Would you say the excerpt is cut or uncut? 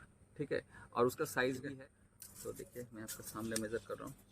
cut